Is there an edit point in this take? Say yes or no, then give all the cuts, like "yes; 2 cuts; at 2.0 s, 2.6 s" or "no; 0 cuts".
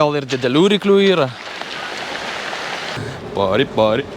yes; 1 cut; at 3.0 s